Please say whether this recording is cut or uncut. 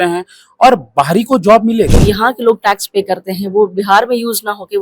cut